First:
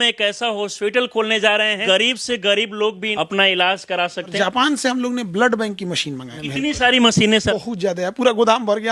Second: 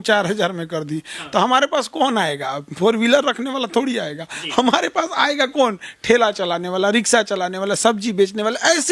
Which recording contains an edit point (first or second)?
first